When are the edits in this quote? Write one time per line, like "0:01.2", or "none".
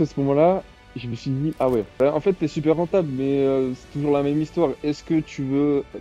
0:01.9